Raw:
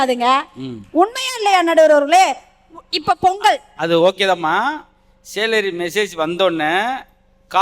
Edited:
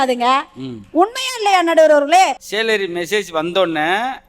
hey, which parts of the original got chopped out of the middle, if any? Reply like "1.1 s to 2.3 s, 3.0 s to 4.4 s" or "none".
2.5 s to 5.3 s